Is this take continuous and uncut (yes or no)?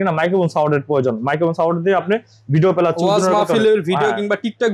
yes